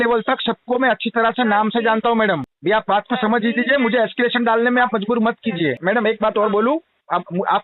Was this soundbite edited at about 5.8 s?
yes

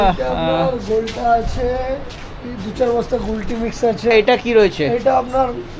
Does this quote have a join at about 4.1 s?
yes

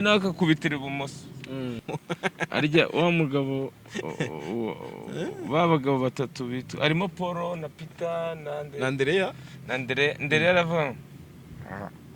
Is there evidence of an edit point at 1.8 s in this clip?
yes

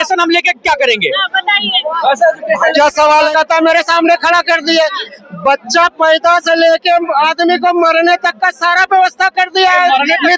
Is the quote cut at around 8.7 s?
no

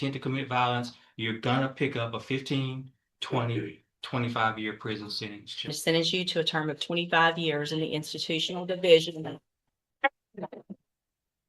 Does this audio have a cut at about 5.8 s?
yes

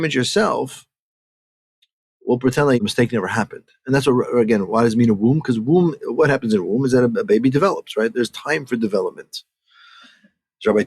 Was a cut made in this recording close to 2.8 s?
yes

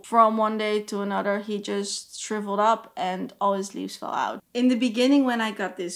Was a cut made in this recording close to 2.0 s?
no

